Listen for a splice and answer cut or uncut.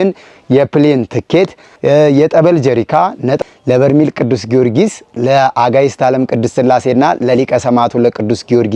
cut